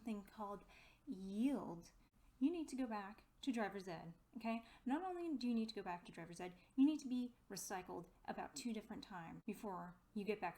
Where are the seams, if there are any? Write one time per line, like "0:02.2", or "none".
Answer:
0:02.2
0:09.3